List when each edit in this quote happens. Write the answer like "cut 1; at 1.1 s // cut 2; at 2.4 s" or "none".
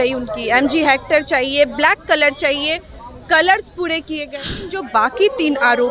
cut 1; at 4.5 s